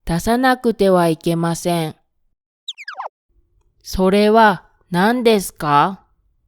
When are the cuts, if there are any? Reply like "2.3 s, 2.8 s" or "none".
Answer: 2.9 s

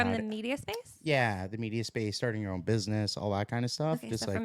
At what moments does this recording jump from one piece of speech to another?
none

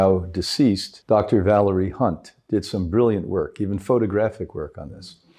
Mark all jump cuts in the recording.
0.9 s

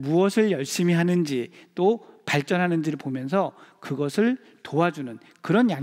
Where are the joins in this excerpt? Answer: none

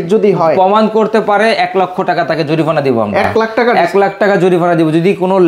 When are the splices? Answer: none

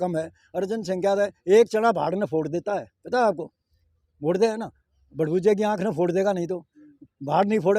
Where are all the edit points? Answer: none

